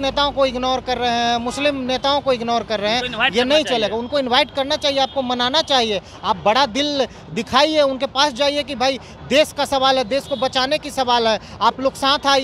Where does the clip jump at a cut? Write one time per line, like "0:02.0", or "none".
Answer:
none